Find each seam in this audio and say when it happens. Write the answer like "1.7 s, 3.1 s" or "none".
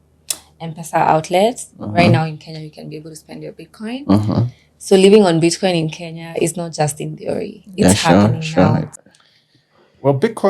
8.9 s